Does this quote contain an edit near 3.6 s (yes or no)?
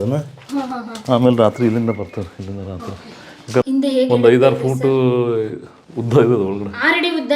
yes